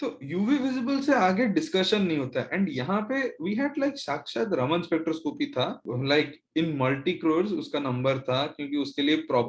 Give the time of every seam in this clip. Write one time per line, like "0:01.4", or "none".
0:05.9